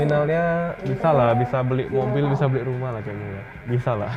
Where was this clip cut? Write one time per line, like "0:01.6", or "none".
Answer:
none